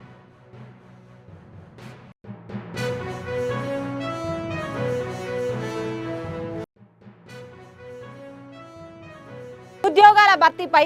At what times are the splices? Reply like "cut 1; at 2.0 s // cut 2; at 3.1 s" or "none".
cut 1; at 1.8 s // cut 2; at 9.8 s

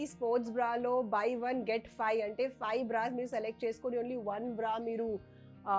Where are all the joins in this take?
none

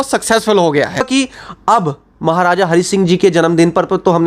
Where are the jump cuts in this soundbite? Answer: cut 1; at 1.1 s

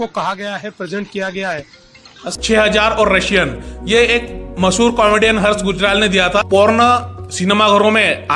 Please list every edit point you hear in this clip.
cut 1; at 2.2 s // cut 2; at 6.5 s

